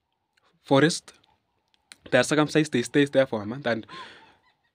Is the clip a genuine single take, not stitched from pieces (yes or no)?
yes